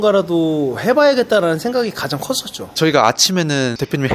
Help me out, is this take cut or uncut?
cut